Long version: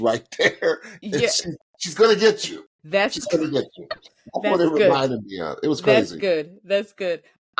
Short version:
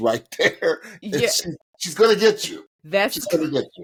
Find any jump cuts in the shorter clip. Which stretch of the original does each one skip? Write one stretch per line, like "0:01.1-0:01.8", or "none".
none